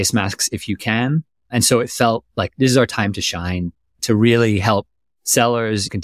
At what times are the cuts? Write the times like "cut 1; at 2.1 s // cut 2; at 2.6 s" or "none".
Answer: cut 1; at 4.0 s